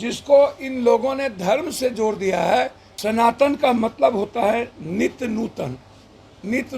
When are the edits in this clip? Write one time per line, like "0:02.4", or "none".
0:02.9